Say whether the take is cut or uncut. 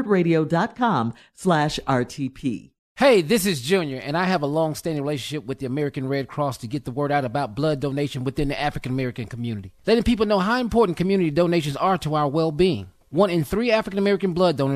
cut